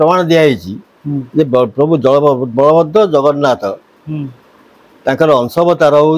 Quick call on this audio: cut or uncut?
uncut